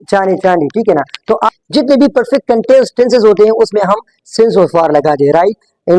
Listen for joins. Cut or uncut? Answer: cut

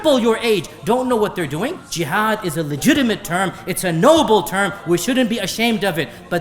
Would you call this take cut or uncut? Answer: cut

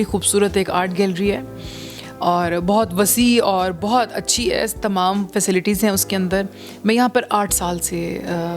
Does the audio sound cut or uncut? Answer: uncut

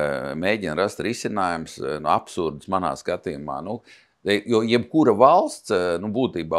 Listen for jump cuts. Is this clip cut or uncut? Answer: uncut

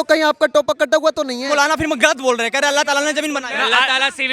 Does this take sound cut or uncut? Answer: cut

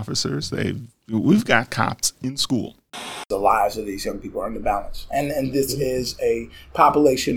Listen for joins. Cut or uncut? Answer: cut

